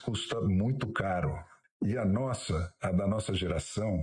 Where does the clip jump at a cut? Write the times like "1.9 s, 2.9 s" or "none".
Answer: 1.5 s